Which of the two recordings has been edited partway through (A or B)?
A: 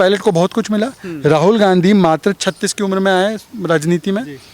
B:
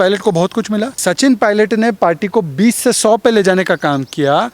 B